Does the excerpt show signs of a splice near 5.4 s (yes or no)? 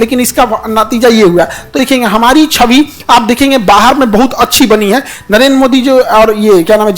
no